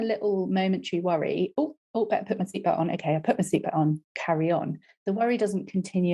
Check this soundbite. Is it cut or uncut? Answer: uncut